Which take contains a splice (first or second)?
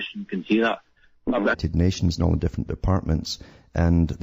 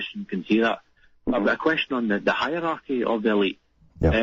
second